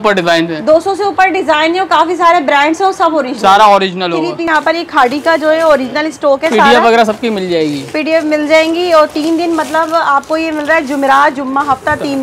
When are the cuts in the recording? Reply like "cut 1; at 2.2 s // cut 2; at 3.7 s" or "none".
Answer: cut 1; at 4.5 s